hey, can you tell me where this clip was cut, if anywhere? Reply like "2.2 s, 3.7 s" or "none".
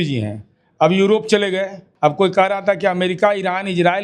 1.8 s